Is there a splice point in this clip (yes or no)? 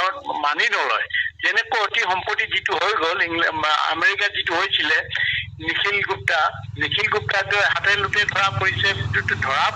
no